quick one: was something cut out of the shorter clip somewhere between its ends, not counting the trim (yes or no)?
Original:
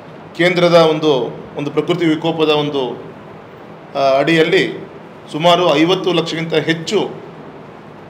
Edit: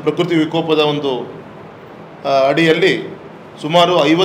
no